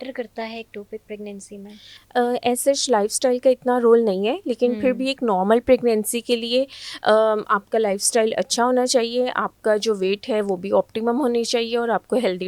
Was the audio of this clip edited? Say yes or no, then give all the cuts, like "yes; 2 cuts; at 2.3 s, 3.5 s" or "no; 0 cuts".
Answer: no; 0 cuts